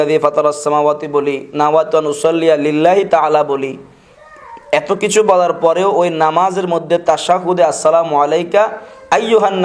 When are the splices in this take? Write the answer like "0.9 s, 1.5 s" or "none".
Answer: none